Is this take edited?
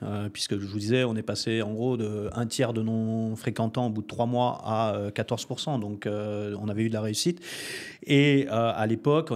no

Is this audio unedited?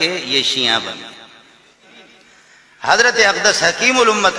no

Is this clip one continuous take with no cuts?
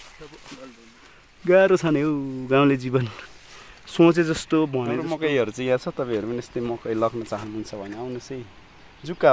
no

